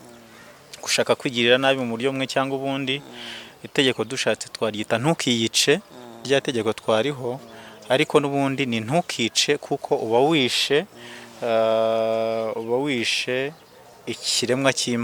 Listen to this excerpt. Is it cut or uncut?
uncut